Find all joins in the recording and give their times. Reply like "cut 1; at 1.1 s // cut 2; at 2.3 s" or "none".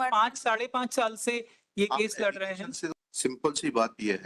cut 1; at 3.0 s